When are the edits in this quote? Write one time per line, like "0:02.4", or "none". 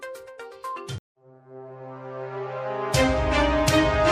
none